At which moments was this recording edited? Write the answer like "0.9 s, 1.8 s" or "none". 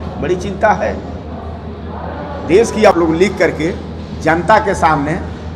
2.9 s